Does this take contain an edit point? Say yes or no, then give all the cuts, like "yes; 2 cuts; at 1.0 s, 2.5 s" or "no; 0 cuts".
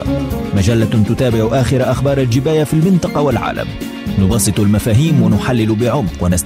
no; 0 cuts